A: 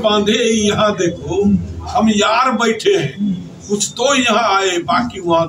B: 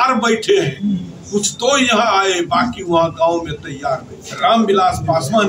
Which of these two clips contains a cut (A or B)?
B